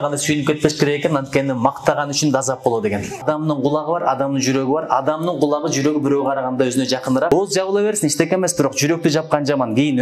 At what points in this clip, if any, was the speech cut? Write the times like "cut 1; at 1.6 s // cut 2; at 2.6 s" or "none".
cut 1; at 3.2 s // cut 2; at 7.3 s